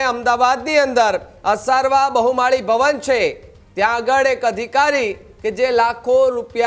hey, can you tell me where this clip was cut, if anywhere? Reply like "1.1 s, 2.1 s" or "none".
none

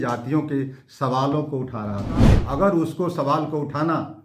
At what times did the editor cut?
2.4 s

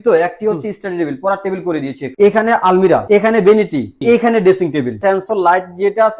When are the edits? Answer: 2.0 s, 3.0 s, 4.0 s, 5.0 s

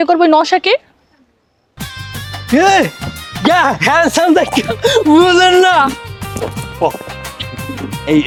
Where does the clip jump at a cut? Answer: none

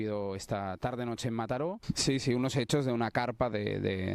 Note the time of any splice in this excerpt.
1.9 s

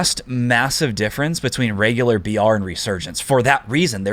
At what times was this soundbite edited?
none

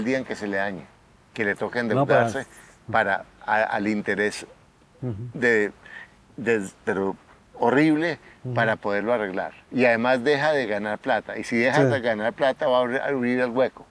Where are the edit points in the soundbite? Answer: none

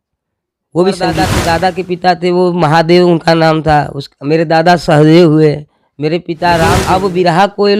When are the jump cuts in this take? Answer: 1.3 s, 6.8 s

